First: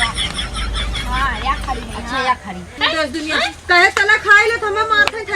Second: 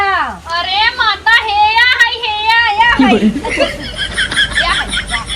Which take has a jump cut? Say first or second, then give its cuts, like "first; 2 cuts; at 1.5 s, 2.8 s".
first; 1 cut; at 2.8 s